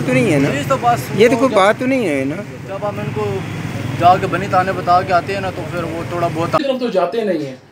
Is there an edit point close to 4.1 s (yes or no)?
no